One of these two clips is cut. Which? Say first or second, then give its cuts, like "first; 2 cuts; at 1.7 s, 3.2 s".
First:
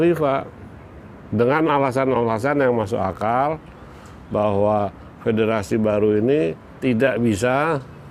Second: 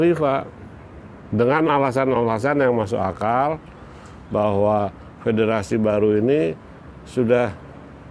first; 1 cut; at 6.7 s